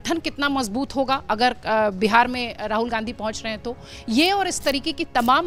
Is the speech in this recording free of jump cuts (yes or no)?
yes